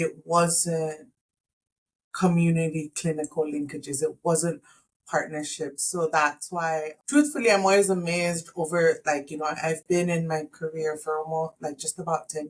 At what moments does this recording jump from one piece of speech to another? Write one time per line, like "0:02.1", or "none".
0:07.0